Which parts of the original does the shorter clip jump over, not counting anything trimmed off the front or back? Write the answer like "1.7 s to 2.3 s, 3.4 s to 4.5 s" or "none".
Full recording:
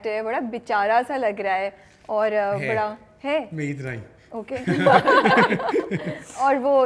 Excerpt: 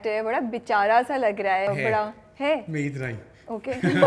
1.7 s to 2.5 s